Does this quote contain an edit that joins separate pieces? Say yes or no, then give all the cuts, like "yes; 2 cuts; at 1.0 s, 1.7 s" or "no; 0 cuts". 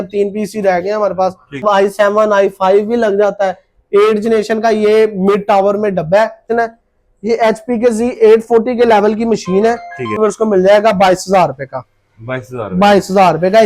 yes; 3 cuts; at 1.6 s, 6.5 s, 10.1 s